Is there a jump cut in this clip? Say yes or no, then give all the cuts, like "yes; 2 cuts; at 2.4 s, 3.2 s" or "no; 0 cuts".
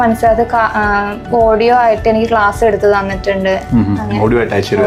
no; 0 cuts